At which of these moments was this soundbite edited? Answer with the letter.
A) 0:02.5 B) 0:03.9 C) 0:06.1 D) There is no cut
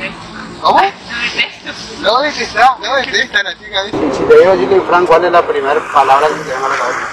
B